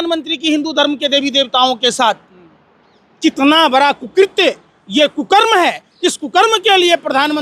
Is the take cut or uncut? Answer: uncut